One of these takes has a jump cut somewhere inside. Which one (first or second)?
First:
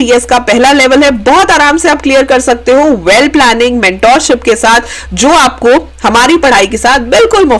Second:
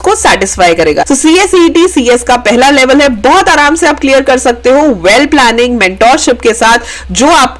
second